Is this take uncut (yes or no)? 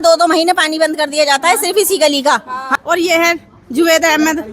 no